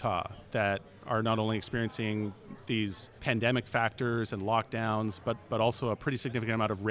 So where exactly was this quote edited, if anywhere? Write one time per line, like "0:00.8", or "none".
none